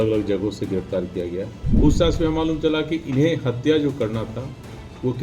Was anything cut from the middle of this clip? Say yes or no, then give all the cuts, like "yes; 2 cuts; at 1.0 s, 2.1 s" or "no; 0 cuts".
yes; 1 cut; at 1.6 s